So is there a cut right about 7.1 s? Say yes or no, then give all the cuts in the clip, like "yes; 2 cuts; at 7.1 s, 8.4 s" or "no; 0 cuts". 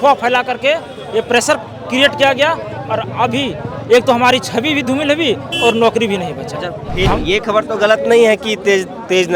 yes; 1 cut; at 7.1 s